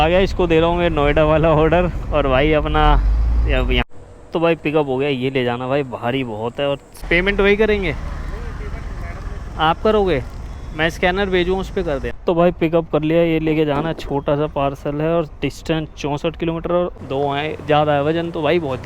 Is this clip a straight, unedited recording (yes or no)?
no